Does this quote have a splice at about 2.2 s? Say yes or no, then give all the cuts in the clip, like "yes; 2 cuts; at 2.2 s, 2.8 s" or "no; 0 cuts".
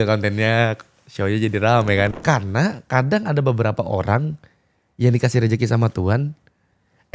yes; 1 cut; at 2.2 s